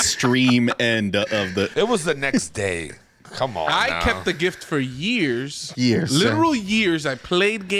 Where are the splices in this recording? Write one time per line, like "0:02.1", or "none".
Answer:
0:01.7